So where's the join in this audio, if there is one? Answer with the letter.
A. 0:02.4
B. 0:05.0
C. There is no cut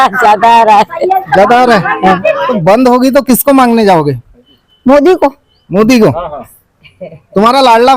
A